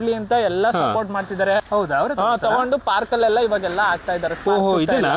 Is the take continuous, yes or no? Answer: no